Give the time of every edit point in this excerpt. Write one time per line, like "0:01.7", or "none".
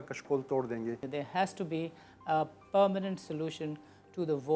0:01.0

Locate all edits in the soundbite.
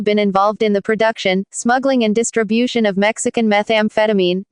none

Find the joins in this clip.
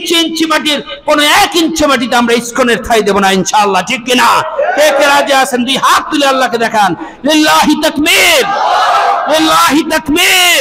none

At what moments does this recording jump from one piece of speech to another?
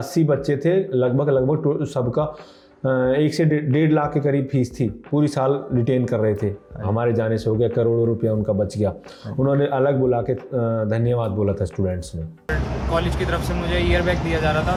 none

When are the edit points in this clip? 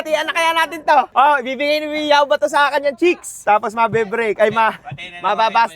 0:03.3

